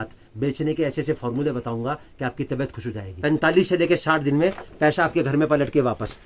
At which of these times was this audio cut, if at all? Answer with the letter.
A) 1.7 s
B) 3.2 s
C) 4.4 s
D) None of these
B